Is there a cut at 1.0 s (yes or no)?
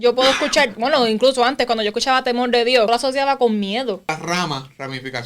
no